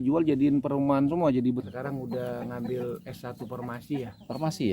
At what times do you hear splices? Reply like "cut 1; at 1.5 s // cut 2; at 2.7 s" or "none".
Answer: cut 1; at 1.7 s